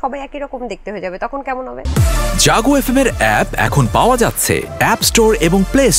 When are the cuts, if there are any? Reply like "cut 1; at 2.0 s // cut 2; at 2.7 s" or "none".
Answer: cut 1; at 1.8 s